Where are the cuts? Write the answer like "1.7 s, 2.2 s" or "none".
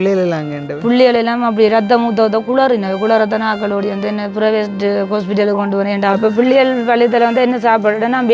6.2 s